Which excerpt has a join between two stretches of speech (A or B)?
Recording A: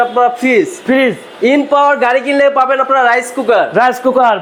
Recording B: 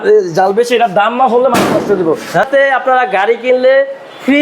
B